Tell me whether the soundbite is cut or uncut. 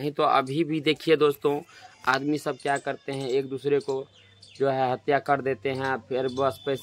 uncut